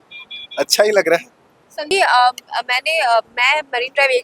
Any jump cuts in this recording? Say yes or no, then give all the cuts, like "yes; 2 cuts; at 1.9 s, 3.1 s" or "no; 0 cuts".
yes; 1 cut; at 1.9 s